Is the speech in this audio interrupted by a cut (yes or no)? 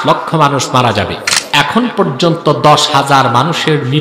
yes